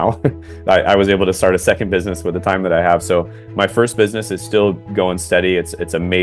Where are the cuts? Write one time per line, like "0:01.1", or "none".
none